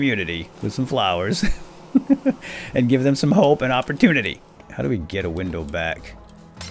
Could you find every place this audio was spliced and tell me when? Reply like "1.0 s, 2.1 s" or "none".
4.6 s